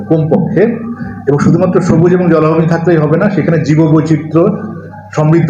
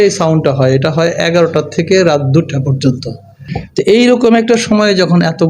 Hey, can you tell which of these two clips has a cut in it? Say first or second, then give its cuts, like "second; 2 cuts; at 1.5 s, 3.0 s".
second; 1 cut; at 3.5 s